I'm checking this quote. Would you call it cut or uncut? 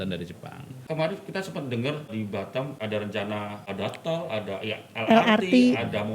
cut